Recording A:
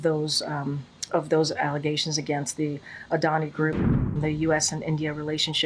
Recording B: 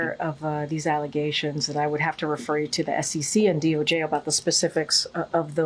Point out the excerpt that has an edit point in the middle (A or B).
A